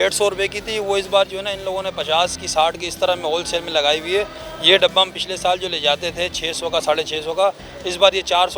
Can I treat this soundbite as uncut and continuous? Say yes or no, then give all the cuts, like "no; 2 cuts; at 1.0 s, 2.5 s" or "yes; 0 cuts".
yes; 0 cuts